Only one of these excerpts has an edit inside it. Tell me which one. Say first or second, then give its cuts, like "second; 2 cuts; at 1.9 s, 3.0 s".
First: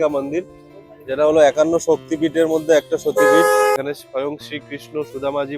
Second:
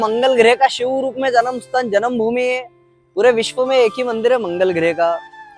first; 1 cut; at 3.8 s